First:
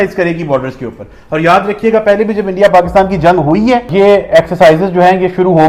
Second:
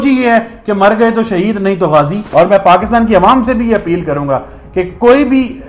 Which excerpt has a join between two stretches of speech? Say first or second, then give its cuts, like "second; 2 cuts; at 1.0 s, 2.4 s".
second; 1 cut; at 2.2 s